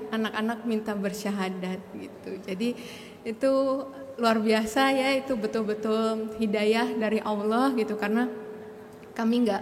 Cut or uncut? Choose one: uncut